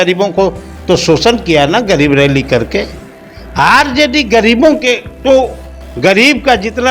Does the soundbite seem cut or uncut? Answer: uncut